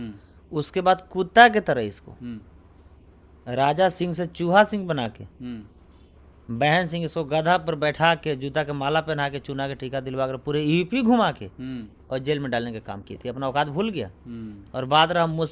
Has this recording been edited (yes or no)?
no